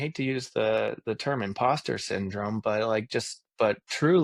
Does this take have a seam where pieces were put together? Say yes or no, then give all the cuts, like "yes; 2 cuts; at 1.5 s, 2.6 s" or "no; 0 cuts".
no; 0 cuts